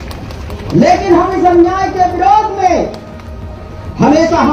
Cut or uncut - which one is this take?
uncut